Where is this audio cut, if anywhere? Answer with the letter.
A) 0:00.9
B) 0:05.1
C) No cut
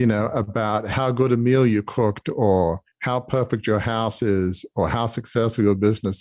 A